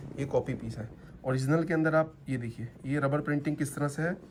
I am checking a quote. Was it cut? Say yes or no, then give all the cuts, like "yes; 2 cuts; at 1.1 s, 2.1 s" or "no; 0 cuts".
no; 0 cuts